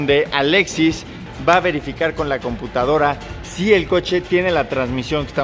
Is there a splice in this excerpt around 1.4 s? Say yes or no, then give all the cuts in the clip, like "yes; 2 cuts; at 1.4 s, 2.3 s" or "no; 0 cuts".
no; 0 cuts